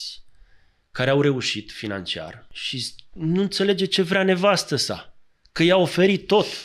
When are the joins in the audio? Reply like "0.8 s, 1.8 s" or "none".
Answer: 2.5 s